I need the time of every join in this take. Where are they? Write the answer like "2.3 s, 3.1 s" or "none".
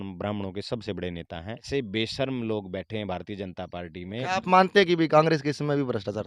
1.7 s, 4.2 s

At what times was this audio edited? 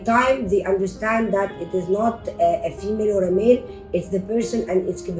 none

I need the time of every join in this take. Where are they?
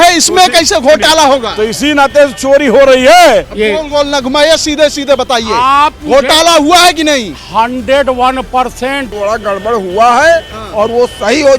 3.5 s, 9.1 s

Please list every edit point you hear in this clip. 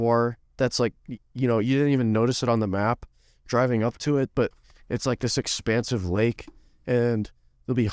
none

